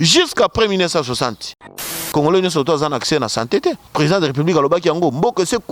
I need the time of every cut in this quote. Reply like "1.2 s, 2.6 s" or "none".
1.7 s, 3.8 s